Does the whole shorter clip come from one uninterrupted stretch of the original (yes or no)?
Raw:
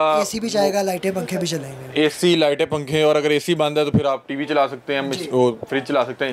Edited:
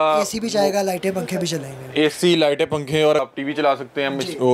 no